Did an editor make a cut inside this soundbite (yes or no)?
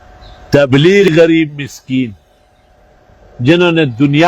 yes